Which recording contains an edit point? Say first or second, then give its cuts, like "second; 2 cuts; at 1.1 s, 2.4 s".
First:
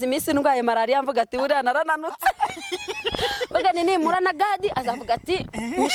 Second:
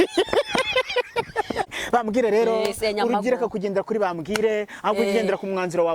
second; 1 cut; at 1.6 s